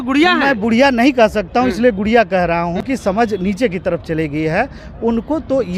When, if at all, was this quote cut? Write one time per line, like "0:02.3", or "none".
0:02.8